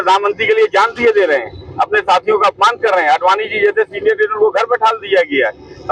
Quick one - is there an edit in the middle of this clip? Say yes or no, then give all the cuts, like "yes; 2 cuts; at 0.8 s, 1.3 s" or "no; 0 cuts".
no; 0 cuts